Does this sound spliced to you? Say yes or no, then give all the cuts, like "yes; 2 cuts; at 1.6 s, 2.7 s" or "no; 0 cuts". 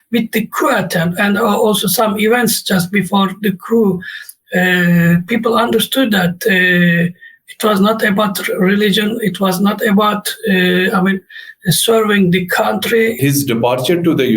yes; 1 cut; at 13.2 s